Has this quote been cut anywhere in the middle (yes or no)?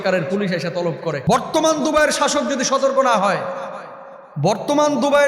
yes